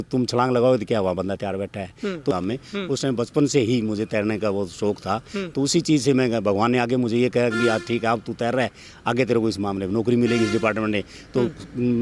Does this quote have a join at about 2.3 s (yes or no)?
yes